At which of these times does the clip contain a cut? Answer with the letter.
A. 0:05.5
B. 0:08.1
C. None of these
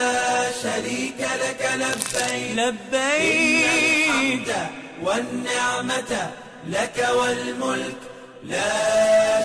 C